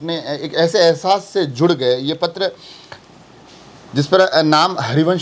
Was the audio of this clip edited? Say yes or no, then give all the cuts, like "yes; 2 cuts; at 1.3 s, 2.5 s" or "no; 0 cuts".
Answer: no; 0 cuts